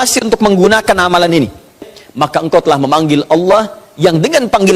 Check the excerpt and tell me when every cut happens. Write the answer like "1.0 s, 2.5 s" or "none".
2.0 s